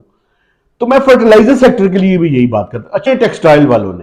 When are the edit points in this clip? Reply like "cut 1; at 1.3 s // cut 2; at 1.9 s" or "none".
cut 1; at 3.1 s